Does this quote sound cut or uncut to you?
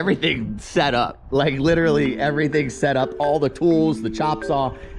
uncut